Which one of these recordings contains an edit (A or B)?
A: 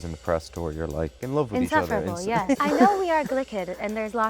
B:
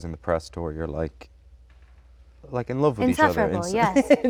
A